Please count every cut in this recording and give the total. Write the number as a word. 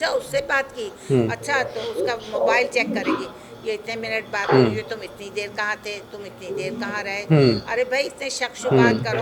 zero